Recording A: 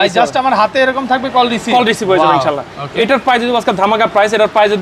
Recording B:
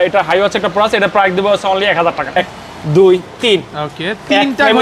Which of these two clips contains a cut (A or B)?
B